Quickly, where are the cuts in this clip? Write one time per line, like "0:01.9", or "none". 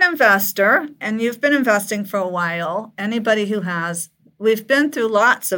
0:00.9